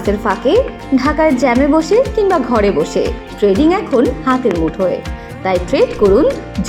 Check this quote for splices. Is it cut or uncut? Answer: uncut